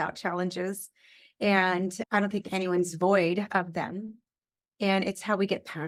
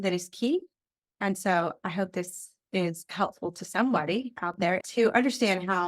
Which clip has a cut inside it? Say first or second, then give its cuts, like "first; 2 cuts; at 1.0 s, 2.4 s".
second; 1 cut; at 4.8 s